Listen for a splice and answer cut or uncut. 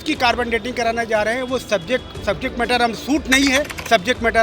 uncut